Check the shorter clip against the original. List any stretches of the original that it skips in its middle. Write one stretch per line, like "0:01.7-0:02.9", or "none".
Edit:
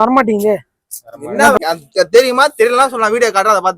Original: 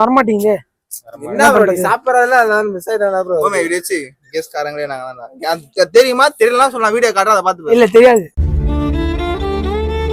0:01.6-0:05.4

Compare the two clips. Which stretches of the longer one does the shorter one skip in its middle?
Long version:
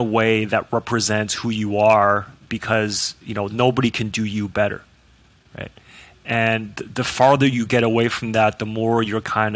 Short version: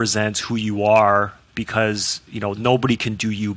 none

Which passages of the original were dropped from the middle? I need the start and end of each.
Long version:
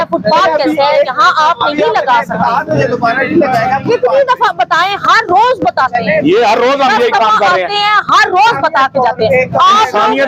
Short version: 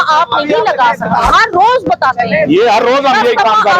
0:02.6-0:05.0

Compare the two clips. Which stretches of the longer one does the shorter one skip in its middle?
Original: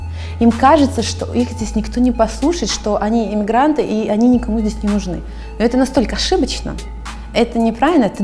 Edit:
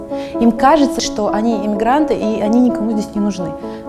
0:01.0-0:02.7

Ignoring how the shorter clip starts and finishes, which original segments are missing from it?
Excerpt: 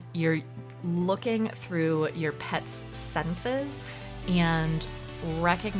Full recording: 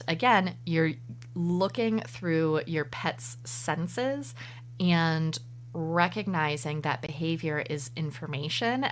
none

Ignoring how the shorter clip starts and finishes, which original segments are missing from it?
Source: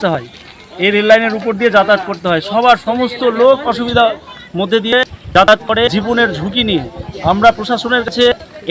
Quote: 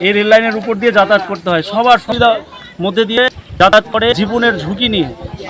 0:02.9-0:03.8

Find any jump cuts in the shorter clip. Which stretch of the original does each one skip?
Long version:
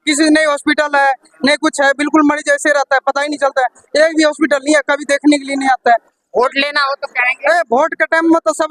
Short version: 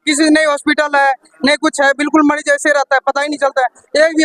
none

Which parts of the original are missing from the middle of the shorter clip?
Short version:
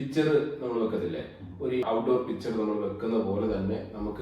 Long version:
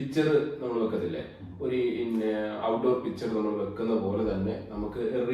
0:01.8-0:02.6

